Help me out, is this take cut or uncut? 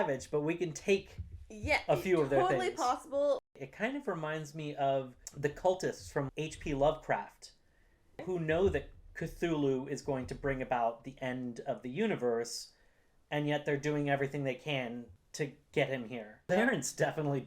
cut